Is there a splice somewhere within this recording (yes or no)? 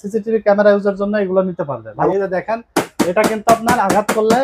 yes